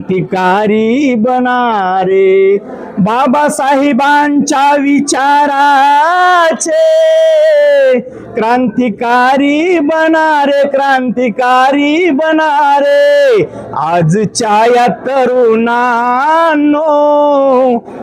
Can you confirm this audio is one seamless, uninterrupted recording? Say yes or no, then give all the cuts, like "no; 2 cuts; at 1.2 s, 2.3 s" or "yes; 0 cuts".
yes; 0 cuts